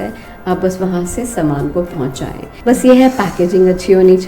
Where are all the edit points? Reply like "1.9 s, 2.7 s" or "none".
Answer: 2.5 s